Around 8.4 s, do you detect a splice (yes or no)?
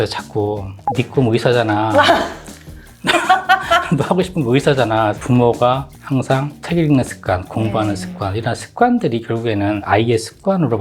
no